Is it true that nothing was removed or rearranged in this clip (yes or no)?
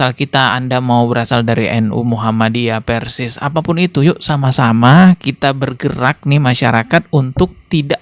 yes